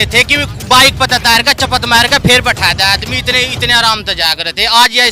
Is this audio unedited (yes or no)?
yes